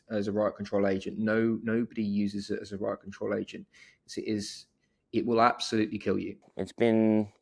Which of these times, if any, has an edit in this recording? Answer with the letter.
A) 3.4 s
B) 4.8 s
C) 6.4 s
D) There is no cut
C